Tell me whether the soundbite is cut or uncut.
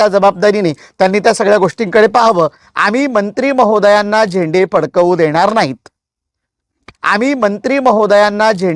cut